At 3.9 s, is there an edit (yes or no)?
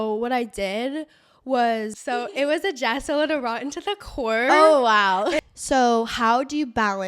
no